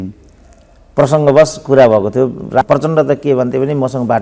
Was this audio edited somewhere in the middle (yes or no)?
yes